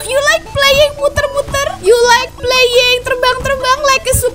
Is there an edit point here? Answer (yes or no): yes